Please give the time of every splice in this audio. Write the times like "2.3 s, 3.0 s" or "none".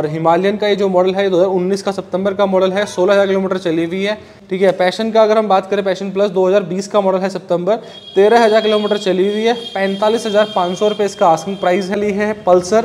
4.3 s, 12.0 s